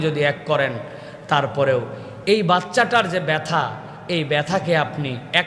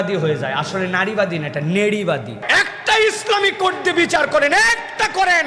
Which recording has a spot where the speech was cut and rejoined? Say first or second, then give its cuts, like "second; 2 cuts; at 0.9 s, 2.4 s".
second; 1 cut; at 2.4 s